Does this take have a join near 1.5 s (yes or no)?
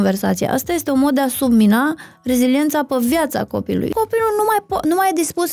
no